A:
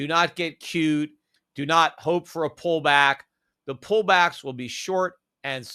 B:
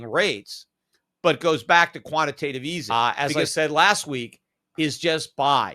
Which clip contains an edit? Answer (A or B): B